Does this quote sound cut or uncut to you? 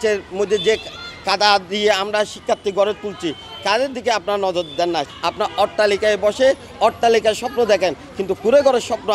cut